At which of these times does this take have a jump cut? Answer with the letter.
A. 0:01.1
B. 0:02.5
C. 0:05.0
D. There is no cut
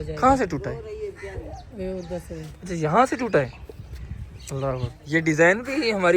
C